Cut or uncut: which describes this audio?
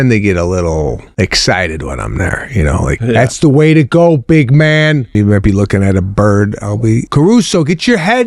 cut